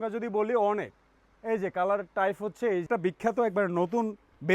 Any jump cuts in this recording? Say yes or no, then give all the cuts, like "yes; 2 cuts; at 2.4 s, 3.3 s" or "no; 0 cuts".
yes; 1 cut; at 2.9 s